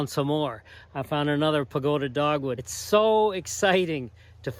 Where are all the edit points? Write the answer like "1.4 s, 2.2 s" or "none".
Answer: 2.7 s

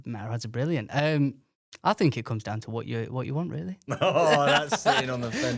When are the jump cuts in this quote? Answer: none

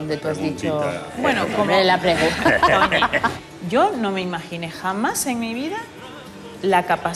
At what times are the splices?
3.5 s

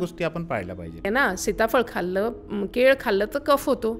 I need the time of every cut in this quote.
1.1 s

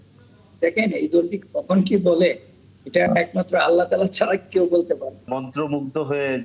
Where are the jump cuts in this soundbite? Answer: 5.3 s

